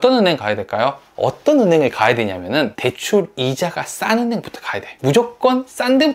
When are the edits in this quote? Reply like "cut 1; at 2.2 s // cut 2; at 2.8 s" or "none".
cut 1; at 1.1 s // cut 2; at 2.9 s // cut 3; at 4.8 s